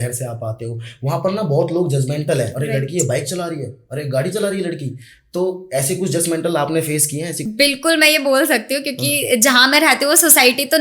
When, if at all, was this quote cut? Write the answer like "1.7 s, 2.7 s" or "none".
2.6 s, 7.4 s